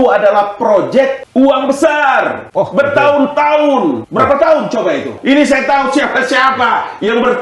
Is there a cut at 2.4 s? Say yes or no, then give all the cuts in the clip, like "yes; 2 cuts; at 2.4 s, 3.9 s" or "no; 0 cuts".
yes; 4 cuts; at 1.2 s, 2.4 s, 4.0 s, 5.1 s